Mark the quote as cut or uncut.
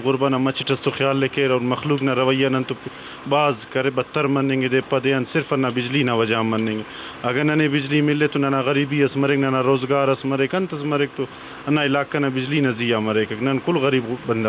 uncut